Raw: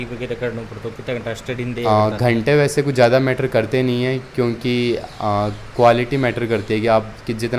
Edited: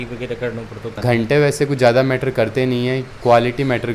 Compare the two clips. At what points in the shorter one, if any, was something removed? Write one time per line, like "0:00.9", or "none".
0:01.0
0:03.1